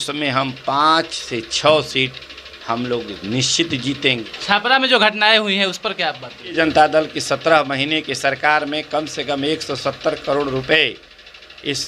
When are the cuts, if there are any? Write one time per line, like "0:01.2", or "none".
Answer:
0:04.3
0:06.5